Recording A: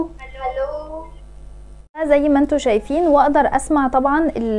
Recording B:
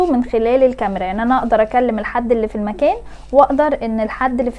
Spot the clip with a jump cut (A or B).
A